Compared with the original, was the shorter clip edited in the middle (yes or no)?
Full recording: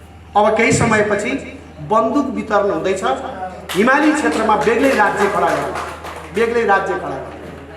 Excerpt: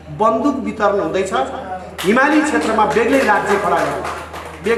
no